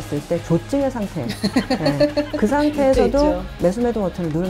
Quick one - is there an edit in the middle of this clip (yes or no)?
no